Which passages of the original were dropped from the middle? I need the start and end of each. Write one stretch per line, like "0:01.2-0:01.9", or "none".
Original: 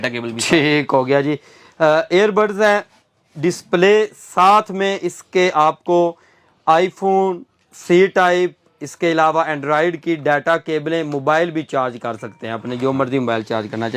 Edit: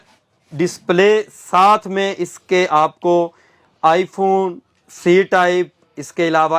none